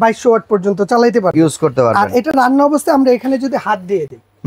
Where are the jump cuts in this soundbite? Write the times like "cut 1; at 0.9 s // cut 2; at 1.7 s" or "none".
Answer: none